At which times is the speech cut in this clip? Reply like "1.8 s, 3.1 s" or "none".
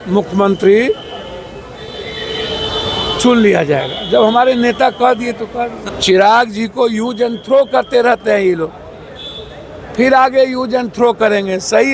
5.8 s